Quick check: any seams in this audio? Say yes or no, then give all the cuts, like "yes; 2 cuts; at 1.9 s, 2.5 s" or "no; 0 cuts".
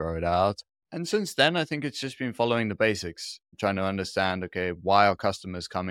no; 0 cuts